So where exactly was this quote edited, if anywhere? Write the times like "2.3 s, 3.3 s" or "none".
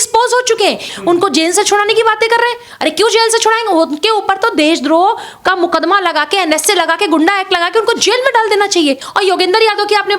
0.9 s, 9.1 s

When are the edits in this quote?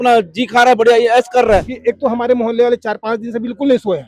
1.7 s

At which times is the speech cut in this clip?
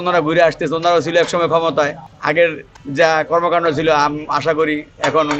none

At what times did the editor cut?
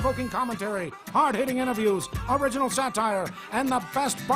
1.0 s, 2.1 s, 3.4 s

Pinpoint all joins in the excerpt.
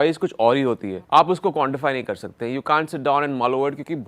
0.9 s

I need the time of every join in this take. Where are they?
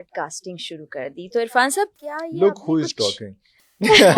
none

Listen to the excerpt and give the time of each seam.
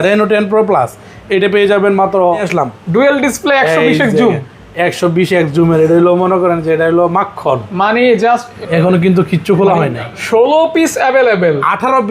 2.5 s, 8.5 s

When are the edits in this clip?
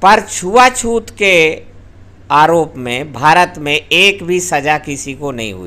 none

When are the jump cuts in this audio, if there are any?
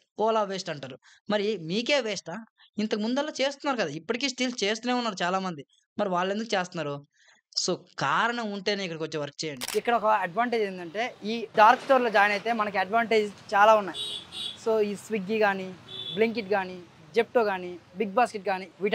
9.6 s

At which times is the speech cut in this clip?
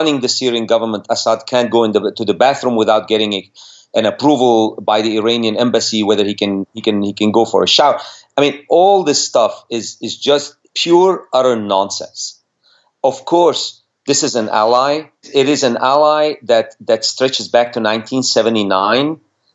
none

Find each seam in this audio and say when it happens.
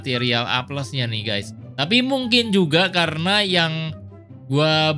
1.6 s

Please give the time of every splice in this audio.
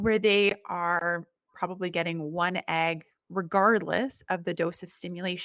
3.1 s

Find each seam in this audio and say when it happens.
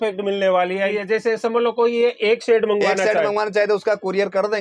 0.9 s

